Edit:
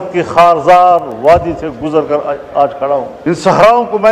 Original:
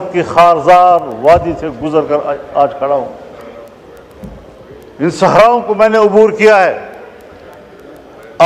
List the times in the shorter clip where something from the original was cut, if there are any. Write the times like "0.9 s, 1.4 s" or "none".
3.1 s